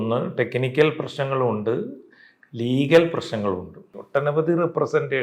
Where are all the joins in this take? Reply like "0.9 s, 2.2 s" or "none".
4.0 s